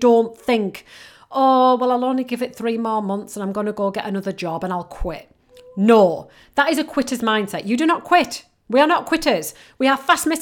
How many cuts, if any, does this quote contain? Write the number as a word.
zero